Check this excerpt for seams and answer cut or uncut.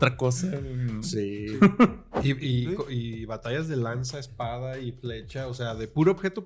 cut